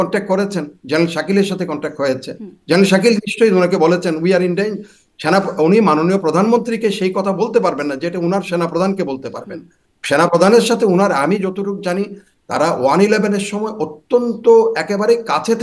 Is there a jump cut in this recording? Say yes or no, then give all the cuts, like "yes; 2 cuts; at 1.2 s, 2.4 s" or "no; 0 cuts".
no; 0 cuts